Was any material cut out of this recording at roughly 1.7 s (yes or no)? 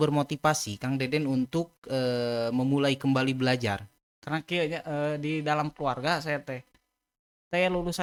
no